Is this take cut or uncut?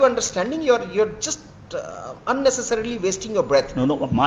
uncut